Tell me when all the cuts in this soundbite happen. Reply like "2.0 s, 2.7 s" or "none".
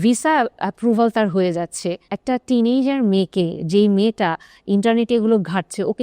2.1 s